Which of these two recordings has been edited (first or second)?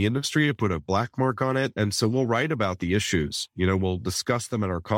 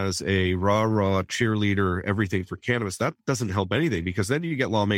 first